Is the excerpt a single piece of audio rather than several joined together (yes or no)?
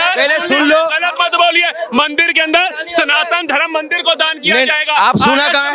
yes